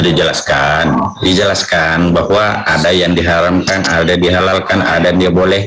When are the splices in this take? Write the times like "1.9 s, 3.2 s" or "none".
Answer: none

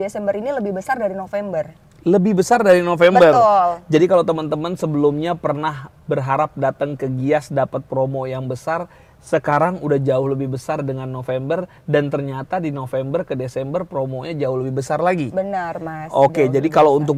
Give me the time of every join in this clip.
none

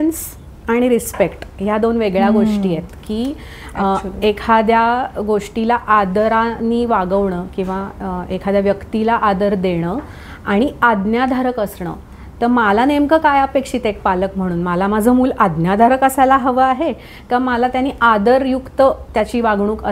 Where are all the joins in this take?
none

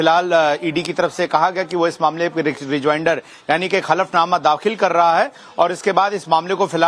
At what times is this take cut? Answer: 2.2 s

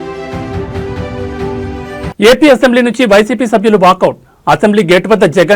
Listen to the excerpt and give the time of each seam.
2.1 s

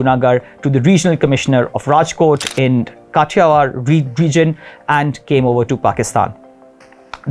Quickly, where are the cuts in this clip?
none

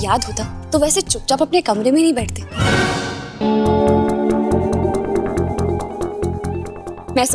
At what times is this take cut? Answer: 2.4 s

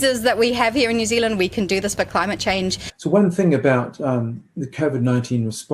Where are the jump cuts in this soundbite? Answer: 2.9 s

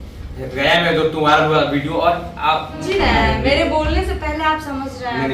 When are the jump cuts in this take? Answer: 2.8 s

